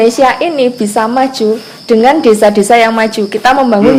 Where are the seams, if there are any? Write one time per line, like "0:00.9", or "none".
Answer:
none